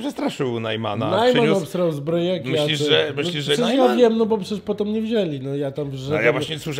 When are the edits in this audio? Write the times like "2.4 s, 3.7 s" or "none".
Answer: none